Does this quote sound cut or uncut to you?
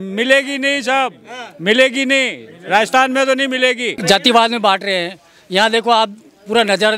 cut